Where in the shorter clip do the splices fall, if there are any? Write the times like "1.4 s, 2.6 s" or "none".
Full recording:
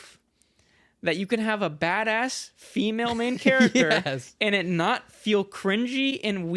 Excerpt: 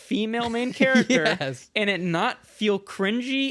none